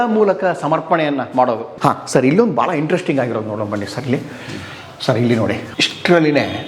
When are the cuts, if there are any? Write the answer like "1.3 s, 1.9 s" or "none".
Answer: 1.7 s, 5.7 s

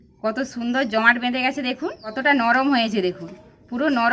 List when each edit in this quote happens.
2.2 s

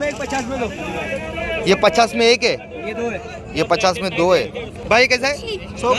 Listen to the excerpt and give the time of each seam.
4.8 s

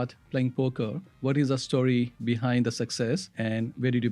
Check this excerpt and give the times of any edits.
1.1 s, 2.2 s, 3.3 s

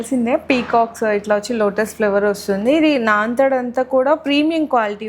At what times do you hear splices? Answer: none

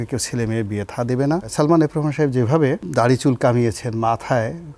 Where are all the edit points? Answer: 1.5 s, 2.8 s

